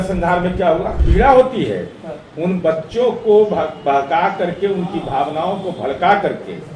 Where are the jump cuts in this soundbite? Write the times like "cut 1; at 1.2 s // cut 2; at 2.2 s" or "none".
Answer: cut 1; at 1.0 s